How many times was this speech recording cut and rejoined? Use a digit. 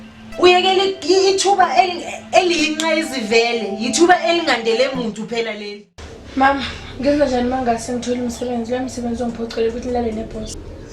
1